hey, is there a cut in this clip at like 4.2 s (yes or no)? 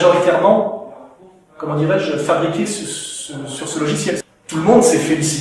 yes